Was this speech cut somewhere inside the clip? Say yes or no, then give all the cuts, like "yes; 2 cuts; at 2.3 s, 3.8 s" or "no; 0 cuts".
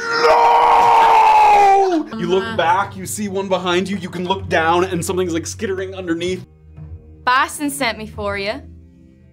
yes; 2 cuts; at 2.1 s, 6.4 s